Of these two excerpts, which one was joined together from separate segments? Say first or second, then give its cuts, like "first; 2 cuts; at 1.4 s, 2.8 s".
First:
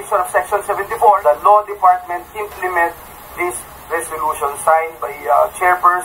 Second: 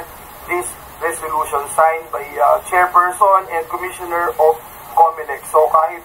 first; 1 cut; at 1.2 s